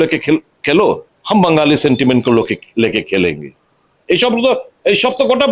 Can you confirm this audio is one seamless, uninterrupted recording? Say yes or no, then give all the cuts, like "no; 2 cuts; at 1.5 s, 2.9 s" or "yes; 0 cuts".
no; 1 cut; at 1.1 s